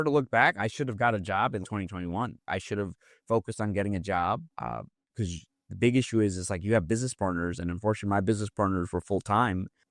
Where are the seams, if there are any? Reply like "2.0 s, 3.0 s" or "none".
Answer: none